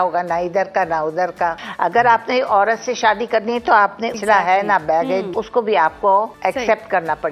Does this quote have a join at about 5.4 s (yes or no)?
yes